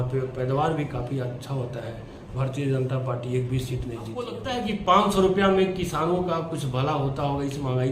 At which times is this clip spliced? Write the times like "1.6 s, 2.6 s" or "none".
4.4 s